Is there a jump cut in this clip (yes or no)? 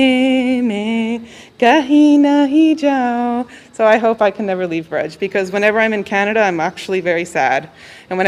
no